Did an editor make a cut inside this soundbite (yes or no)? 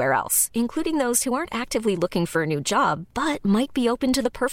no